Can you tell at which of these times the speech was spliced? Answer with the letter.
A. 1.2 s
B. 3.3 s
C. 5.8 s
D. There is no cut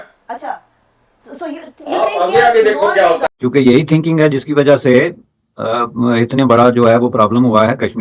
B